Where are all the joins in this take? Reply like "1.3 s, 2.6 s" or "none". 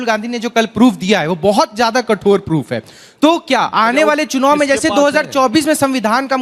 none